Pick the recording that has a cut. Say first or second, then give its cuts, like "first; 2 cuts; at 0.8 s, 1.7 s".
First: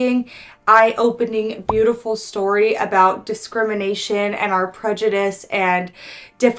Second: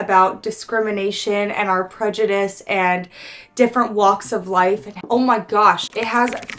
second; 1 cut; at 5.0 s